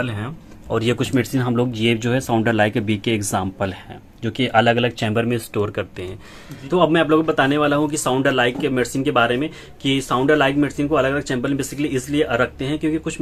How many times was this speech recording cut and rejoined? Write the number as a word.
zero